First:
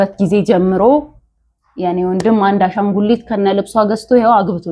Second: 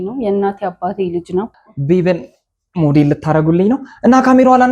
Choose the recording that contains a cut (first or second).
second